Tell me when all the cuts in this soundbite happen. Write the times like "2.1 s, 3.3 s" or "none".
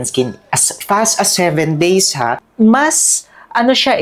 2.4 s